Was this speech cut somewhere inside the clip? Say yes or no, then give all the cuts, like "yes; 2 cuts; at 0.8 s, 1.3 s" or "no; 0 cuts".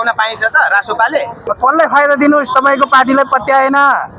yes; 1 cut; at 1.4 s